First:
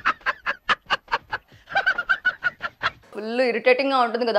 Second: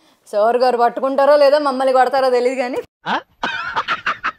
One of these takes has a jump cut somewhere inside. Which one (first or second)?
first